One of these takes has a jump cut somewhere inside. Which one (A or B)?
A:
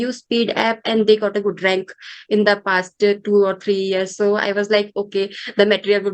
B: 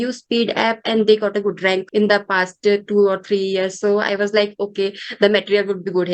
B